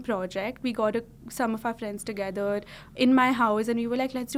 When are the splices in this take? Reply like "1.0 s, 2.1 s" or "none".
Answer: none